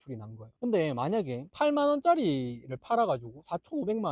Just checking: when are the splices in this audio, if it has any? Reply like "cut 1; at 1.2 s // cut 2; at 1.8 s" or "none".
none